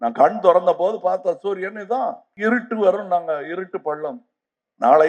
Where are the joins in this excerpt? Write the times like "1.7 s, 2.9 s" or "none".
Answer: 2.3 s